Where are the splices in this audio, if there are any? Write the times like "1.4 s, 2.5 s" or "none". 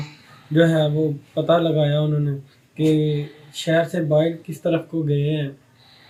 none